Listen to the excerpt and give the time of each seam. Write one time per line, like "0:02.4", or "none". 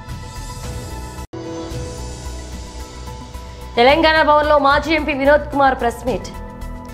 0:01.3